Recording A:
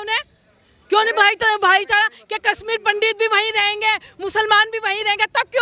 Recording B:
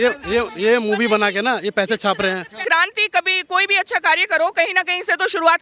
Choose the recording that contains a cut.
B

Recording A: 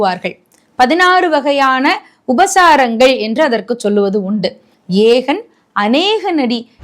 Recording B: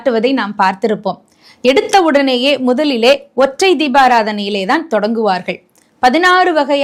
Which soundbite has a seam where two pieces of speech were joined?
A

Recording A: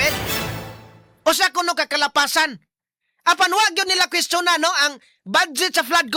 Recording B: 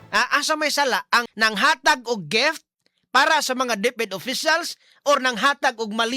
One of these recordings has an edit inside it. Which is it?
B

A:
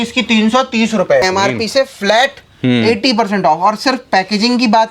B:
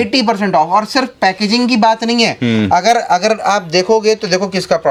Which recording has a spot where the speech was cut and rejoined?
A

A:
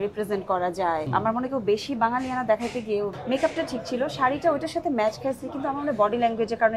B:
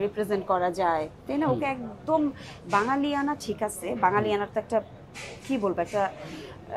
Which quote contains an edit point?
A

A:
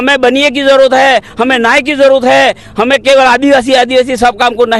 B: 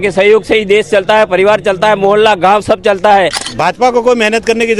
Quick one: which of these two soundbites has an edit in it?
B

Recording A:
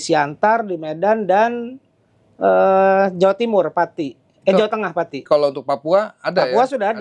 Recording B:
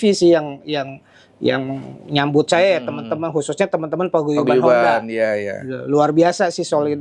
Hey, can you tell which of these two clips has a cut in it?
A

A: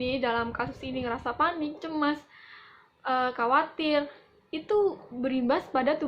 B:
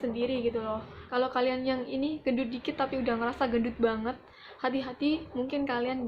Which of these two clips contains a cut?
B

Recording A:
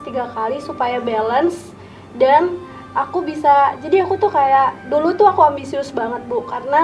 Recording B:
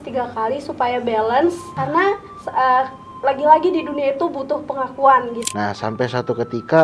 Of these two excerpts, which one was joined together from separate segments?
B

